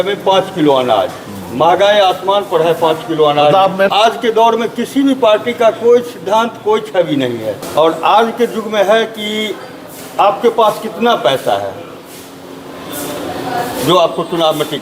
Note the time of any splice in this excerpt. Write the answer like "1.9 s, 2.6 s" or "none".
3.9 s, 7.6 s